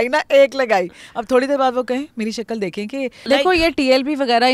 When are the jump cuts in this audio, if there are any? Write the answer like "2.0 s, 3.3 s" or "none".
3.2 s